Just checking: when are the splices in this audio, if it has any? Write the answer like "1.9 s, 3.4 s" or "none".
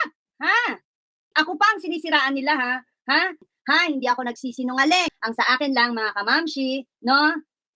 1.3 s

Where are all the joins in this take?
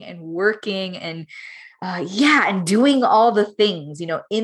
none

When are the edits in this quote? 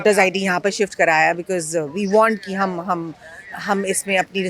none

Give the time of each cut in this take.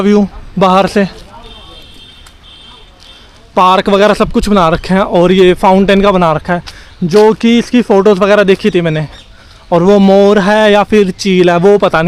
none

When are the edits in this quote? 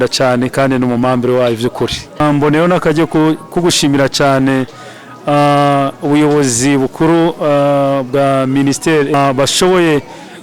2.2 s, 9.1 s

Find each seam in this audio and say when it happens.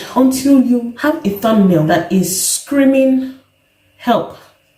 0.9 s, 1.9 s

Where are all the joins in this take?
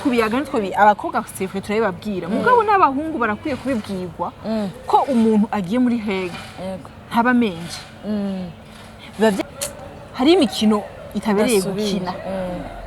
9.4 s

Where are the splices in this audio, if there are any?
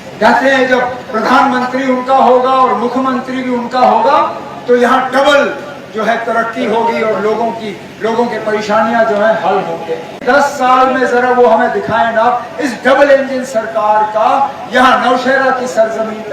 10.5 s

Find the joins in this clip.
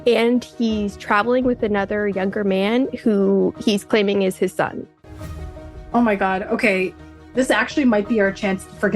5.4 s, 7.3 s

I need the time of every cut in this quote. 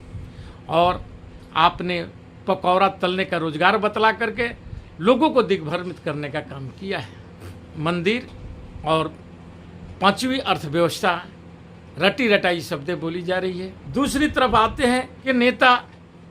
7.6 s, 13.8 s, 15.1 s

